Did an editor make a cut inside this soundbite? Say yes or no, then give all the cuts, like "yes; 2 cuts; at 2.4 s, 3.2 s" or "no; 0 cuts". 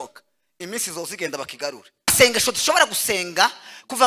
yes; 1 cut; at 2.1 s